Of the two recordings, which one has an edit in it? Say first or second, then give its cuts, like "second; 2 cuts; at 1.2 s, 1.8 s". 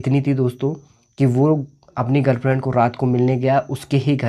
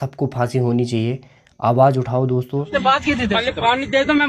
second; 1 cut; at 2.7 s